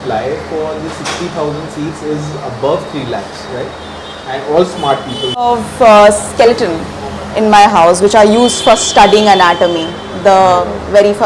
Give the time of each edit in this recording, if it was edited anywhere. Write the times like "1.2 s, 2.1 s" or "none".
5.5 s

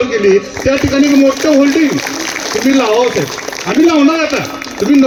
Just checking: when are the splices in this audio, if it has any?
none

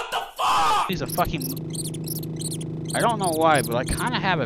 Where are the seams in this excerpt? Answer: 0.9 s

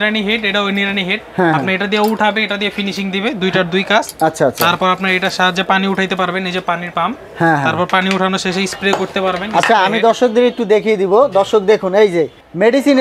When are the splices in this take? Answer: none

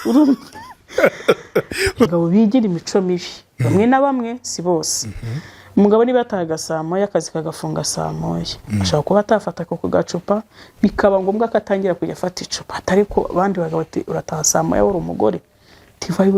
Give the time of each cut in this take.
2.1 s

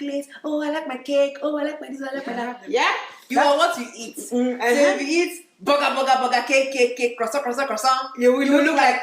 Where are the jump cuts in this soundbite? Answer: 2.5 s

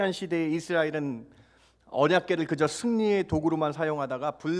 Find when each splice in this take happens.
none

